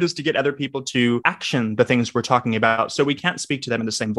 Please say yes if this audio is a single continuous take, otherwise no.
no